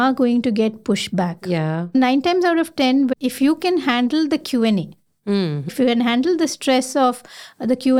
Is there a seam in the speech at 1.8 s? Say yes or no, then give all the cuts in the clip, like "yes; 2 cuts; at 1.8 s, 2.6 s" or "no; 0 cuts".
yes; 3 cuts; at 1.8 s, 3.1 s, 5.7 s